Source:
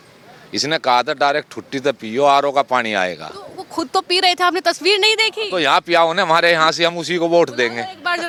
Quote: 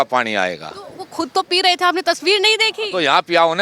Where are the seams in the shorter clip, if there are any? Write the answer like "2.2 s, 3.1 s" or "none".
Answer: none